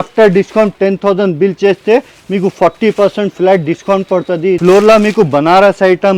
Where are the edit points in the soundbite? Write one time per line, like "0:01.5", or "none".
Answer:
0:04.6